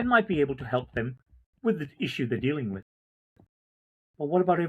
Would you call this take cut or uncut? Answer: uncut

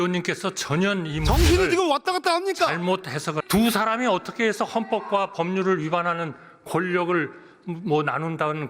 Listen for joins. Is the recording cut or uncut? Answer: cut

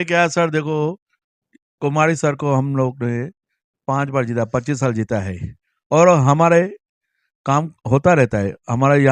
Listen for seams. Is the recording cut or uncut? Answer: uncut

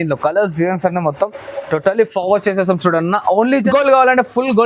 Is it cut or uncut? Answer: cut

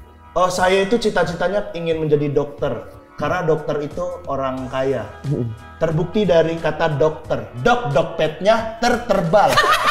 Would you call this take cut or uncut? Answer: uncut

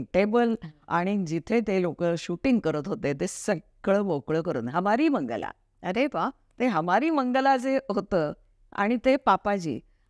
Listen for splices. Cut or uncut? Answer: uncut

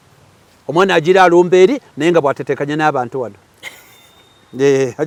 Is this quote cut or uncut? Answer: uncut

